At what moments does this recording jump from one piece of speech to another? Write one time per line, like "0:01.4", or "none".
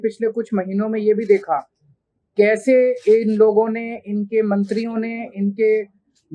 none